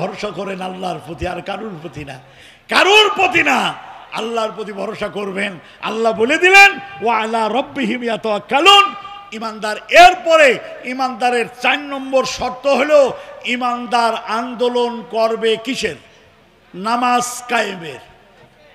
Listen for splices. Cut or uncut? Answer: uncut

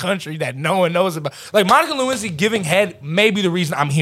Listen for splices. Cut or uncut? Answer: cut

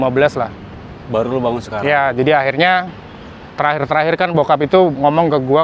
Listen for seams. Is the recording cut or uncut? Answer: uncut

